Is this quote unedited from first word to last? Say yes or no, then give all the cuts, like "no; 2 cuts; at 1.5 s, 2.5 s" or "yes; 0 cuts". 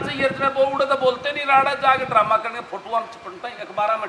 yes; 0 cuts